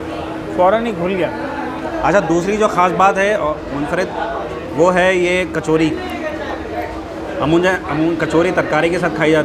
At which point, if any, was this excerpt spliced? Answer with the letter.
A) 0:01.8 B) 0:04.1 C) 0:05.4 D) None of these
A